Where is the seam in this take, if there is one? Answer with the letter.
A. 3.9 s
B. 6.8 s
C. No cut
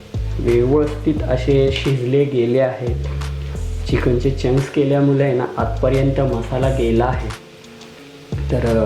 C